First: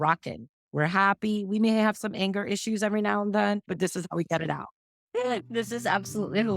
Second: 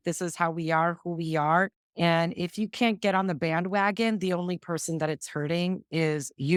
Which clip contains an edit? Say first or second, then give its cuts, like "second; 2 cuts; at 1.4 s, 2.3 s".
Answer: first; 1 cut; at 4.8 s